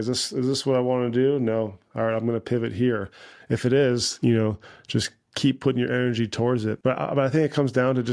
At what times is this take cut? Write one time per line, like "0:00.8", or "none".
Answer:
0:06.8